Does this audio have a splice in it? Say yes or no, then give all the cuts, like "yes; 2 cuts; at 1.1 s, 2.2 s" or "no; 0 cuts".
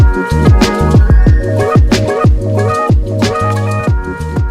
no; 0 cuts